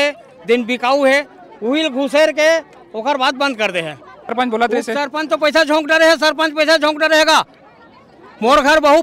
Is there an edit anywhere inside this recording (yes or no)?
yes